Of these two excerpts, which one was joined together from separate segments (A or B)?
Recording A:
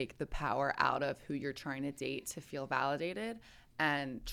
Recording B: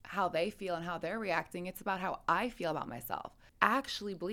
B